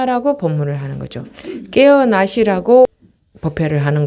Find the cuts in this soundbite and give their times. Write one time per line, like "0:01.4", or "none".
0:02.9